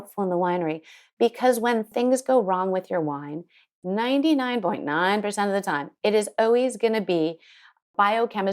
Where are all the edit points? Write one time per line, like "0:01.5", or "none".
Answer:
0:01.9
0:03.7